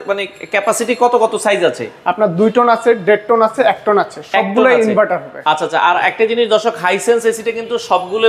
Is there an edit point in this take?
no; 0 cuts

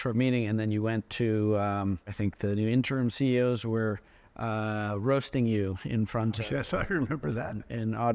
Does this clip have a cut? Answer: yes; 1 cut; at 2.1 s

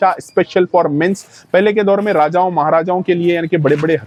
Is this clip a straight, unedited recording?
yes; 0 cuts

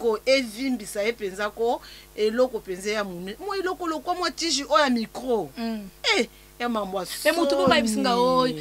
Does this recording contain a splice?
no; 0 cuts

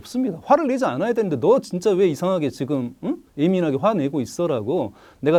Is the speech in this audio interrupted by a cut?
no; 0 cuts

